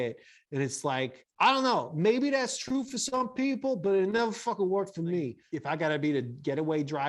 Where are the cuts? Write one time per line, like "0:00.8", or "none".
0:01.2
0:05.4